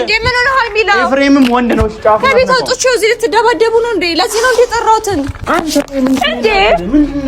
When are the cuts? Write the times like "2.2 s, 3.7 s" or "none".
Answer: 5.4 s